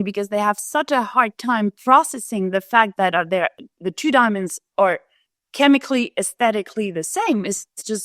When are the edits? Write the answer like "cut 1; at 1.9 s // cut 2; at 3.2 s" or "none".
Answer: none